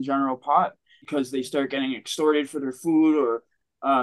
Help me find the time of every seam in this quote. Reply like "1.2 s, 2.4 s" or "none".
1.1 s